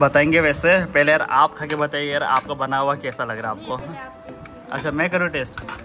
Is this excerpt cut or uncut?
uncut